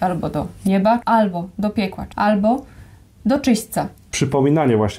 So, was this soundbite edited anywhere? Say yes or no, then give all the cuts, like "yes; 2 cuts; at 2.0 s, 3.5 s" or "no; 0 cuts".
yes; 3 cuts; at 1.0 s, 2.0 s, 4.2 s